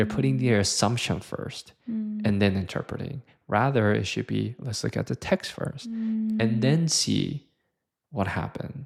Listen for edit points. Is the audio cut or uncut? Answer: uncut